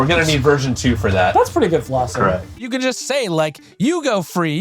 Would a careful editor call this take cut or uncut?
cut